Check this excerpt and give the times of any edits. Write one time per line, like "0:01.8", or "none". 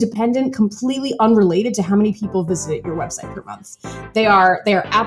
none